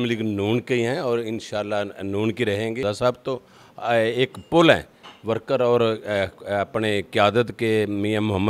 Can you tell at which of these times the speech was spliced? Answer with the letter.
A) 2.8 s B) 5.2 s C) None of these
A